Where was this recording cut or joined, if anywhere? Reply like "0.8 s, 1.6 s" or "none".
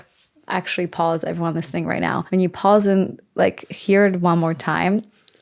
none